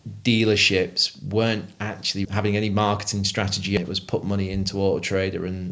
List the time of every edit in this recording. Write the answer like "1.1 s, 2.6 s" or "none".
2.3 s, 3.8 s